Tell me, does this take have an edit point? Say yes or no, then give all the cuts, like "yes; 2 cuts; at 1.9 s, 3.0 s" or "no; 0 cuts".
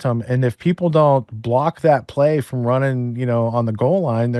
no; 0 cuts